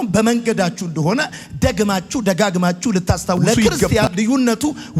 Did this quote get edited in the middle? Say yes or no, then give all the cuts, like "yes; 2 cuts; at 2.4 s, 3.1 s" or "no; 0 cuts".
yes; 1 cut; at 3.9 s